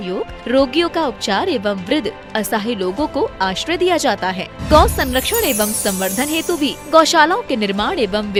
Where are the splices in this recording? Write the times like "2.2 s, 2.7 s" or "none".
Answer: none